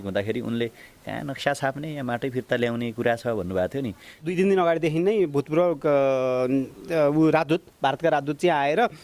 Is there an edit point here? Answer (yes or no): yes